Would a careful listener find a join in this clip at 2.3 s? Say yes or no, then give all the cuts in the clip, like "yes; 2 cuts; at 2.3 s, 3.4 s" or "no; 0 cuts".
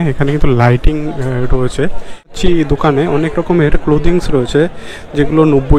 yes; 1 cut; at 2.3 s